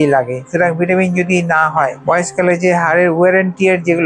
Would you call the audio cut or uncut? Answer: cut